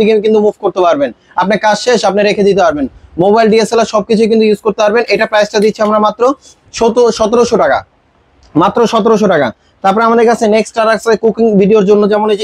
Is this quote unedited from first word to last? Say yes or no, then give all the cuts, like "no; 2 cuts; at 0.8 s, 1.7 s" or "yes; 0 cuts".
yes; 0 cuts